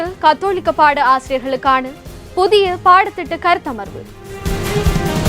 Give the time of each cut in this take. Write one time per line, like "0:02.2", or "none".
0:04.3